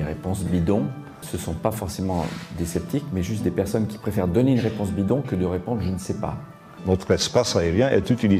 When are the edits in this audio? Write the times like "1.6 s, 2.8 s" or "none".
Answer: 1.3 s, 6.8 s